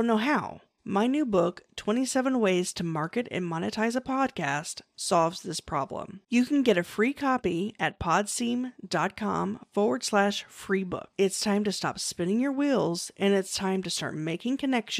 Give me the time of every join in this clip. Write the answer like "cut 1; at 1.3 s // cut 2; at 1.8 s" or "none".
none